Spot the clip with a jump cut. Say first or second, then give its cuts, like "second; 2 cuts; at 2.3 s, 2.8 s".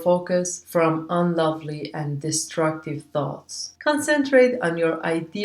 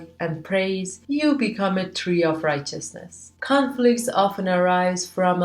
second; 1 cut; at 3.2 s